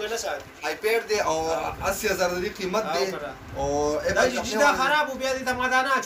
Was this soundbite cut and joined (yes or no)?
no